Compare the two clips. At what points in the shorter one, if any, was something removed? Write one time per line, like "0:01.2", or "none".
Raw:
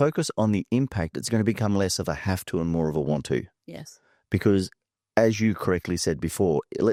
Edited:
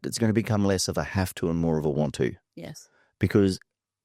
none